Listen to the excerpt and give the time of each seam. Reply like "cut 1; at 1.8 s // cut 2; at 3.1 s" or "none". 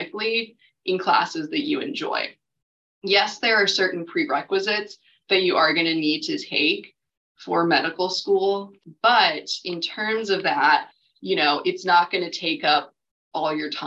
none